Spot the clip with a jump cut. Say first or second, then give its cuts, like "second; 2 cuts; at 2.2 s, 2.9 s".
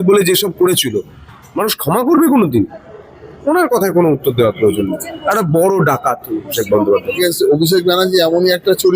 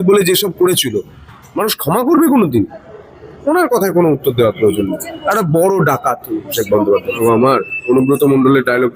first; 1 cut; at 7.2 s